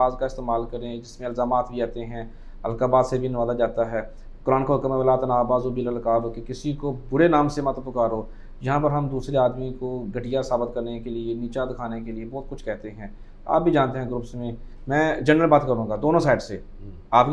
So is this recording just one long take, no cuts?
yes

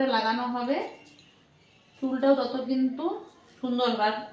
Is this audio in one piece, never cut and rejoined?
yes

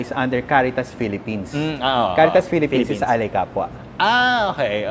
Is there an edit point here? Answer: no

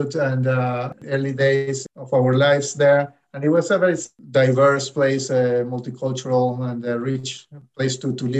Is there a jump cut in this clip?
yes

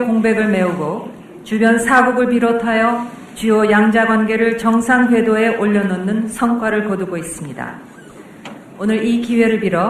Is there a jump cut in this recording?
yes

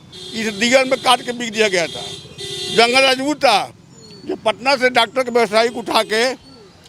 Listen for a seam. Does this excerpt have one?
no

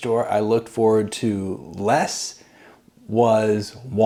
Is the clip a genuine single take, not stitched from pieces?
yes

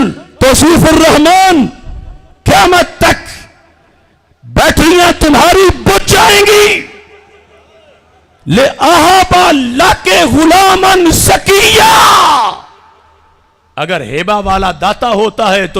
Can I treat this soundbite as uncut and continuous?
yes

